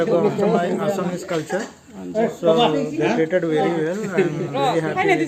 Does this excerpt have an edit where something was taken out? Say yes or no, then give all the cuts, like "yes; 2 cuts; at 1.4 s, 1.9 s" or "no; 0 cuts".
no; 0 cuts